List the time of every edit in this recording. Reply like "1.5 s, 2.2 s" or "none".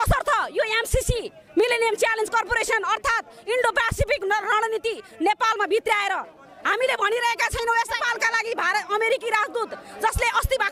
8.0 s